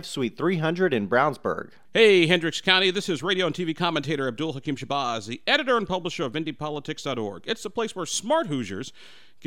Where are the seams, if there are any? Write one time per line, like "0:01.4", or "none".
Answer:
0:01.7